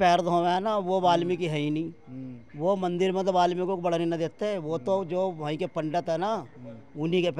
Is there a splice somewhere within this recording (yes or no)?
no